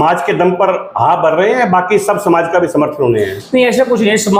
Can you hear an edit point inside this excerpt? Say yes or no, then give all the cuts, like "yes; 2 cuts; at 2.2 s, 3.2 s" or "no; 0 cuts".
no; 0 cuts